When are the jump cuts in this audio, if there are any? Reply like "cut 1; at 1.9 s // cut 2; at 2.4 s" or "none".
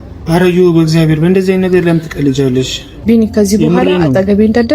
cut 1; at 2.9 s